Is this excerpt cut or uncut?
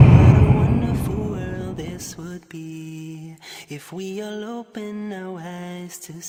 uncut